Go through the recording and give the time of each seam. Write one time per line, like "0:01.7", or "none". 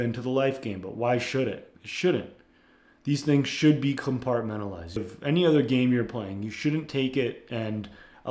0:01.7
0:05.1